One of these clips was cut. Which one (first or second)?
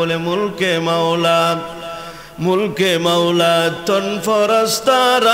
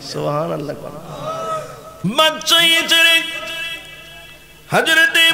second